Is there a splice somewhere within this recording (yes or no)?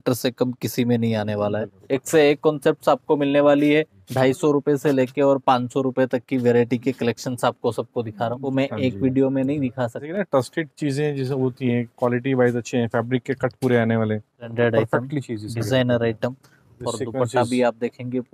yes